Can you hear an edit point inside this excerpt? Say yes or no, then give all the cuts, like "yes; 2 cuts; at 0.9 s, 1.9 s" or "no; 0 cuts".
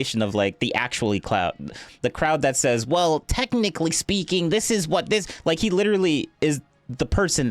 no; 0 cuts